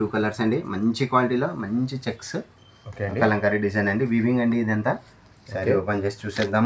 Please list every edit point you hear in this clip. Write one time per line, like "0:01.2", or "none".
none